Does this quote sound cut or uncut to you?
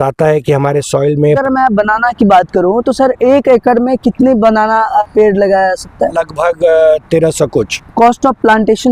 cut